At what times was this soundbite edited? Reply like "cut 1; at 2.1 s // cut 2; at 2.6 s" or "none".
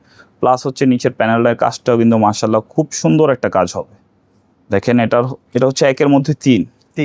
none